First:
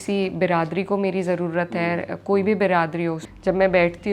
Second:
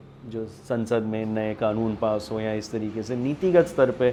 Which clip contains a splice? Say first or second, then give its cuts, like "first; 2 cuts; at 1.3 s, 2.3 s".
first; 1 cut; at 3.2 s